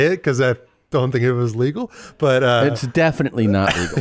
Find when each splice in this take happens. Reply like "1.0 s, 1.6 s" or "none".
none